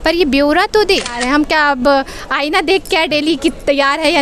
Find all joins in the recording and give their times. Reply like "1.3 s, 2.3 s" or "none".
1.2 s